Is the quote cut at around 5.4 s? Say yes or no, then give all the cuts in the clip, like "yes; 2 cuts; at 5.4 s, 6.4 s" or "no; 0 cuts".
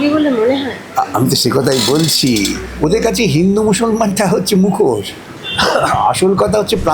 no; 1 cut; at 2.7 s